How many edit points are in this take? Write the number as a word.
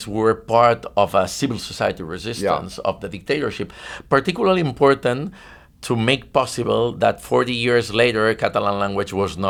zero